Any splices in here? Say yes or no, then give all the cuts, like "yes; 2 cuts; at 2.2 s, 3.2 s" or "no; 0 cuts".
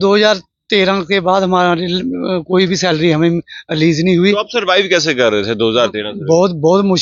no; 0 cuts